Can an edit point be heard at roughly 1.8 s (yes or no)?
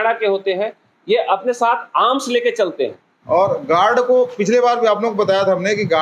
no